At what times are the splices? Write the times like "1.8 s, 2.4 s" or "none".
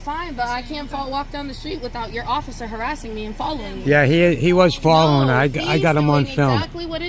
none